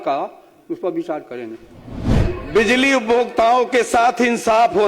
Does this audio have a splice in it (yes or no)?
yes